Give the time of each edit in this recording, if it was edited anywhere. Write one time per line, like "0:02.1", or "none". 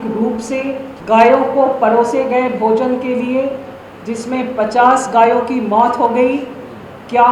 0:00.9